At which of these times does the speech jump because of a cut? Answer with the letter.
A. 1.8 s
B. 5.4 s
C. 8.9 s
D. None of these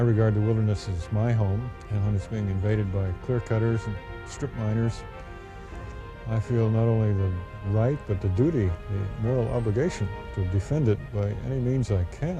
A